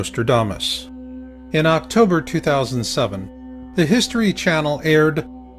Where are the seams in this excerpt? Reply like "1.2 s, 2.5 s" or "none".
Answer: 1.1 s